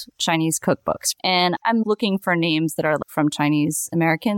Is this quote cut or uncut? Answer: cut